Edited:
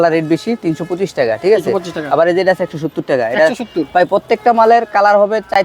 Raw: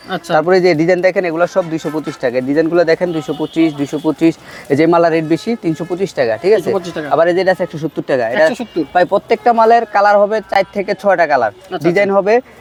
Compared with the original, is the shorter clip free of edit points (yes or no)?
yes